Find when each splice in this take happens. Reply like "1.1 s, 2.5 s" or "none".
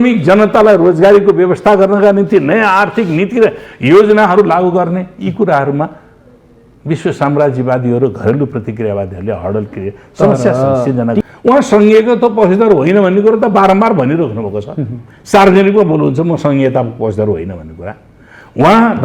11.2 s